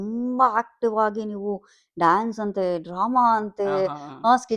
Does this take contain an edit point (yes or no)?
no